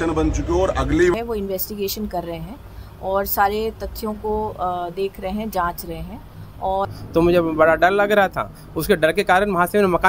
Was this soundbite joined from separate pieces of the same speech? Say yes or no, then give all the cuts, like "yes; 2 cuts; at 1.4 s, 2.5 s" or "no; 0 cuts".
yes; 2 cuts; at 1.1 s, 6.9 s